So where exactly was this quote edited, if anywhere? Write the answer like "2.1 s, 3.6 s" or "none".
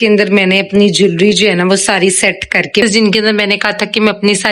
2.8 s